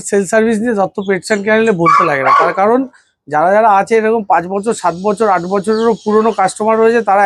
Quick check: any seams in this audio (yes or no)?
no